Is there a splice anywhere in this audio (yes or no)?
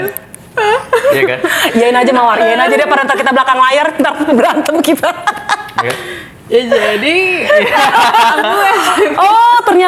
no